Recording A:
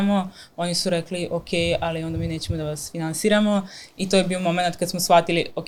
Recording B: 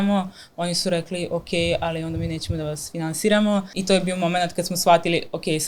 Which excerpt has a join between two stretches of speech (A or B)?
B